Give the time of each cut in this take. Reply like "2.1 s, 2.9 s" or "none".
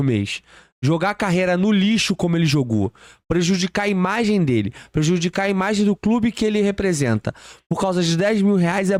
none